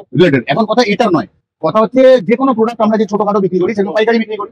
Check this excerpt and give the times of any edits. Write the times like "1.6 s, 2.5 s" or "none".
none